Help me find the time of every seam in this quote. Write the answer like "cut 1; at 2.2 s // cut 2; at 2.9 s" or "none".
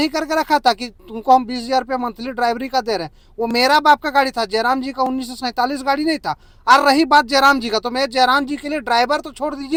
none